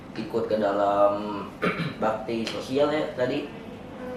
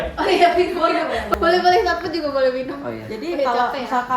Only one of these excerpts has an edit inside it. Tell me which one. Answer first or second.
second